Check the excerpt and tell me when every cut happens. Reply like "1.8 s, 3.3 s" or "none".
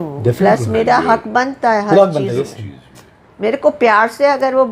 none